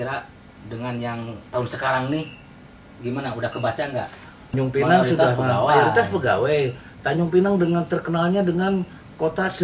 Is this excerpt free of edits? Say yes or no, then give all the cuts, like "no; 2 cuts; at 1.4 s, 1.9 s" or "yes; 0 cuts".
no; 1 cut; at 4.5 s